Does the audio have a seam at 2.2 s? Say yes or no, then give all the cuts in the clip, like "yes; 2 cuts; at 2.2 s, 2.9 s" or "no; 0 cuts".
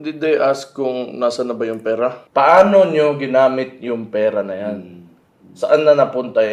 yes; 1 cut; at 2.2 s